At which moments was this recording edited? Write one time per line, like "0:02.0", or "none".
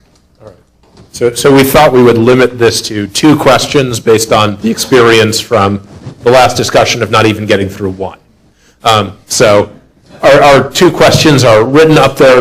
0:01.7